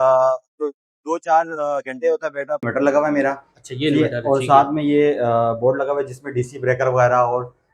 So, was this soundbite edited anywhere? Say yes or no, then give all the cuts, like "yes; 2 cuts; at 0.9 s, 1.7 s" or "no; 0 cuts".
yes; 1 cut; at 2.7 s